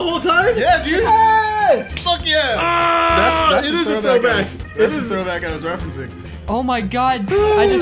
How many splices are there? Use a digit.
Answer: 1